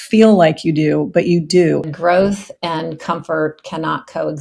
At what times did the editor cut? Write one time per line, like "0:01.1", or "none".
0:01.8